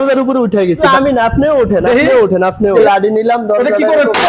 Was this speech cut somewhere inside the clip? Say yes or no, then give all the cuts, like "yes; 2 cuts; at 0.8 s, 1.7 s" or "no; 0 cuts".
yes; 2 cuts; at 0.8 s, 2.8 s